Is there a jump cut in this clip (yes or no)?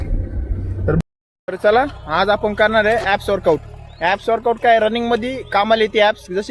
yes